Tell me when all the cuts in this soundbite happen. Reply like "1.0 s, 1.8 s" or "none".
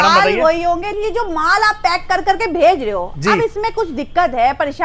0.9 s